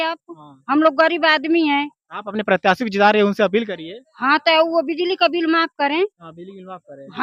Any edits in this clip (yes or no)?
no